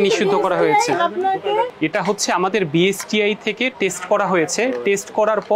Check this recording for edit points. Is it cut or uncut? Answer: cut